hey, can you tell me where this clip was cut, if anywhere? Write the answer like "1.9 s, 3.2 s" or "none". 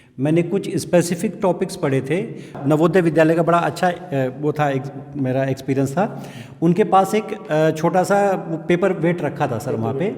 2.6 s